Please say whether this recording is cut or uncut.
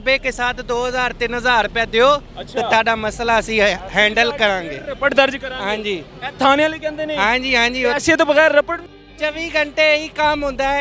uncut